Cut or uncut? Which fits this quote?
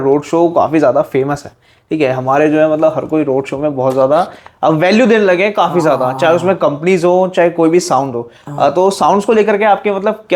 uncut